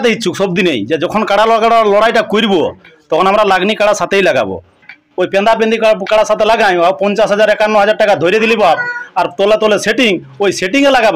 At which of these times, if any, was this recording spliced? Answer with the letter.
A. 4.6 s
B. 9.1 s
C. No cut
C